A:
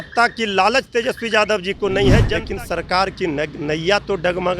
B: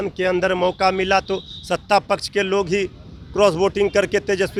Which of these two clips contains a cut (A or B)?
A